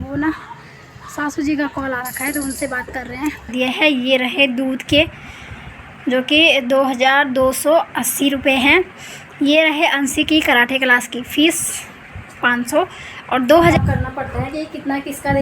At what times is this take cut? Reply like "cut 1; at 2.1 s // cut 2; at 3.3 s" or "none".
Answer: cut 1; at 3.5 s // cut 2; at 13.7 s